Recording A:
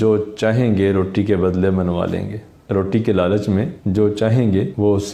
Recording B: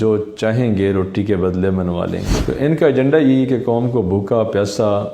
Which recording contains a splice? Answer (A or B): B